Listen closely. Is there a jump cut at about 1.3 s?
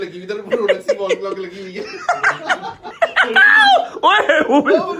no; 1 cut; at 2.8 s

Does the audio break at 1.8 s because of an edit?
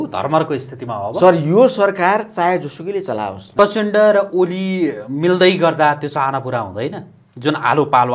no; 1 cut; at 3.4 s

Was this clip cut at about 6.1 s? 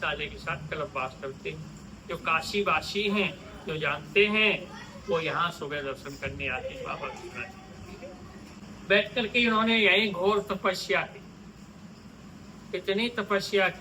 no; 1 cut; at 8.6 s

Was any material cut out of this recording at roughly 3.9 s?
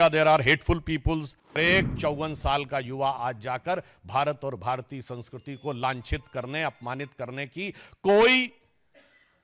no; 1 cut; at 1.6 s

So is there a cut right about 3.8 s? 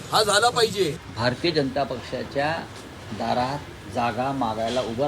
no; 1 cut; at 1.1 s

